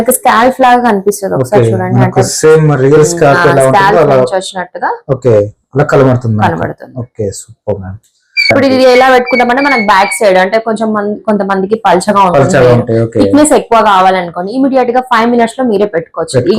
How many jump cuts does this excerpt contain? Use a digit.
1